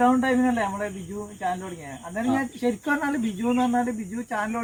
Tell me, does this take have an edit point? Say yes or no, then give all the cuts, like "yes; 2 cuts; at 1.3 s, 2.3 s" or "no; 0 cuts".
no; 0 cuts